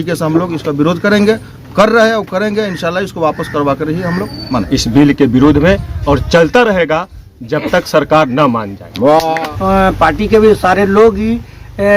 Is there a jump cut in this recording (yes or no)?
yes